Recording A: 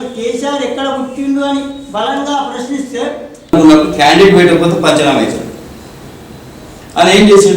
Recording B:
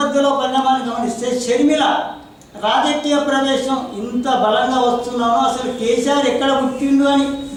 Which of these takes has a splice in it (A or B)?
A